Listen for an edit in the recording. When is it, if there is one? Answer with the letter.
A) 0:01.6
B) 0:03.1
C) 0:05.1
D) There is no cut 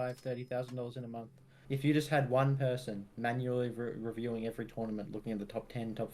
A